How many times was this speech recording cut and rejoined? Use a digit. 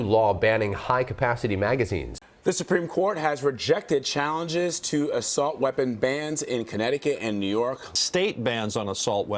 2